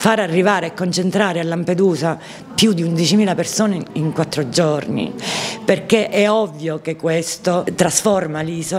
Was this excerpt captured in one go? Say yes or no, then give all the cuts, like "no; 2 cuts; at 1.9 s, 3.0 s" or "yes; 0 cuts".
yes; 0 cuts